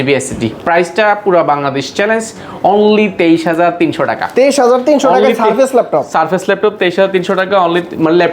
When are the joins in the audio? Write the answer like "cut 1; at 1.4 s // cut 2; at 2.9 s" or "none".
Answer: none